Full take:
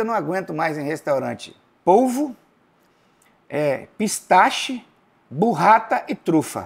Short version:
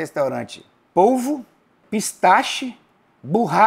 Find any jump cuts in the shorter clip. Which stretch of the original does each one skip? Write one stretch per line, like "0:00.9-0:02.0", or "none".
0:02.7-0:03.9